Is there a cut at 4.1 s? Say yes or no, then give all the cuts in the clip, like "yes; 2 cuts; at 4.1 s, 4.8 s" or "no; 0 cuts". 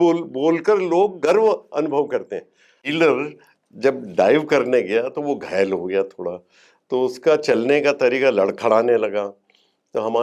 no; 1 cut; at 2.8 s